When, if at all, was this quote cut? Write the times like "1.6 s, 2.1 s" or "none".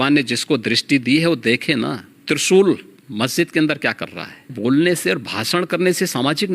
2.1 s, 3.0 s, 4.5 s